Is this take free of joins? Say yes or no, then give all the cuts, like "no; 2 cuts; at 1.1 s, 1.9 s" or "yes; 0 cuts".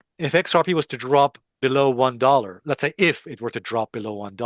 yes; 0 cuts